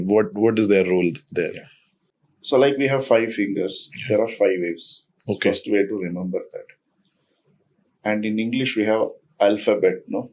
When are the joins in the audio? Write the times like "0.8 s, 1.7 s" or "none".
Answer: none